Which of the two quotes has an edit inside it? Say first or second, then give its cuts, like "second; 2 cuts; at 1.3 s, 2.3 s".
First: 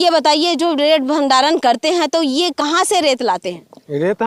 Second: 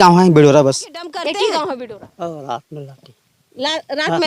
second; 1 cut; at 1.8 s